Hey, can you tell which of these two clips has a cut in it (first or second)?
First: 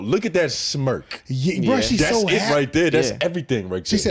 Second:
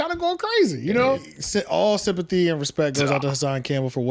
second